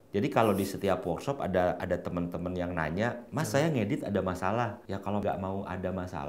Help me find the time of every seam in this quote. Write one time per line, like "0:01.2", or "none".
0:05.2